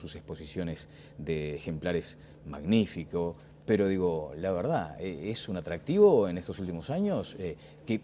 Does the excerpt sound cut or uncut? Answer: cut